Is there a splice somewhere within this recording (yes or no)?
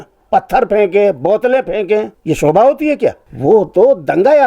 yes